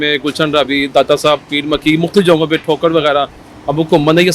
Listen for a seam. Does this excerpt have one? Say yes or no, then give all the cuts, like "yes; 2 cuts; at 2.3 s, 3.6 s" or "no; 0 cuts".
no; 0 cuts